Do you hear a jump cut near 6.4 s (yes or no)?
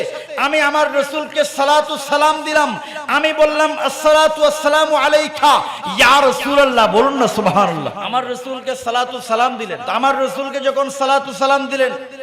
no